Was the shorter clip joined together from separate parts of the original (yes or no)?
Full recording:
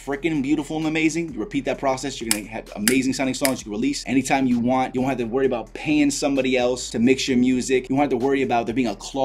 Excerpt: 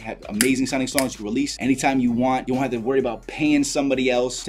no